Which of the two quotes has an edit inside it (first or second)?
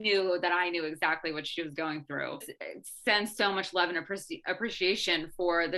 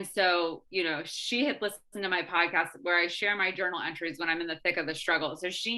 first